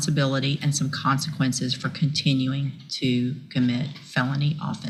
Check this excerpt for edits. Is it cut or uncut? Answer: uncut